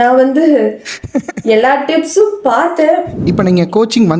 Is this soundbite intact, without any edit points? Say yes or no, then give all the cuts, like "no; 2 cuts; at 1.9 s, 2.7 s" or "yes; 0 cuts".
no; 1 cut; at 3.1 s